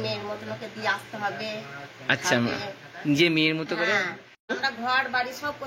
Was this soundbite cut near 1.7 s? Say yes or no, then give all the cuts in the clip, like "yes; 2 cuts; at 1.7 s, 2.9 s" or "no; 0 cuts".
no; 1 cut; at 4.3 s